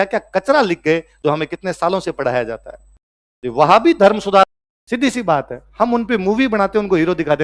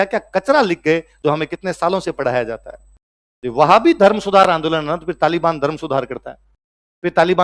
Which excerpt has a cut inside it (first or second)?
first